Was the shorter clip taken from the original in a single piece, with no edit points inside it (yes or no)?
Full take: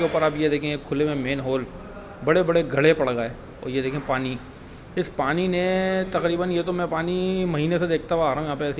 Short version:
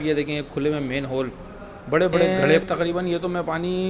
no